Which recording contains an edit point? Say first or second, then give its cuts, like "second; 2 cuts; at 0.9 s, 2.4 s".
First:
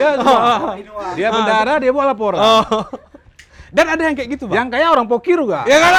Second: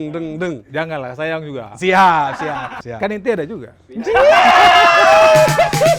second; 1 cut; at 2.7 s